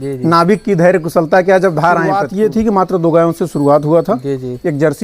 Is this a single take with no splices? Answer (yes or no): no